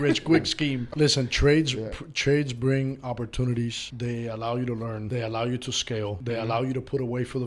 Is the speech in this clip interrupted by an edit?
yes; 4 cuts; at 0.8 s, 3.9 s, 5.0 s, 6.2 s

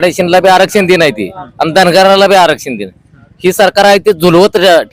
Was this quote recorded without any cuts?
yes; 0 cuts

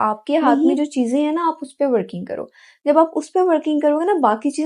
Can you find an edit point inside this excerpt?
no; 0 cuts

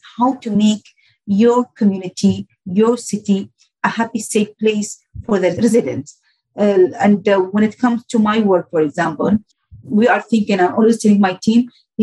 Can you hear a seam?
no; 0 cuts

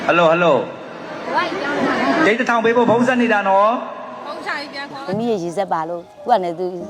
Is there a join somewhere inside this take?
no; 0 cuts

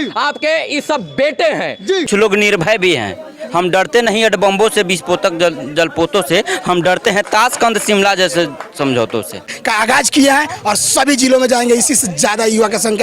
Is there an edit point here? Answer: yes; 2 cuts; at 2.0 s, 9.6 s

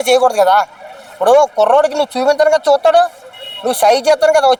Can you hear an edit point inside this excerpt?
no; 0 cuts

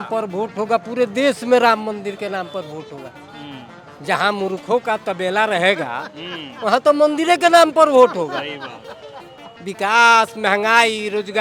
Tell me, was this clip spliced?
no; 0 cuts

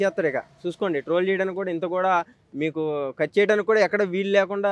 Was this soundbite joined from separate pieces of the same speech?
no; 0 cuts

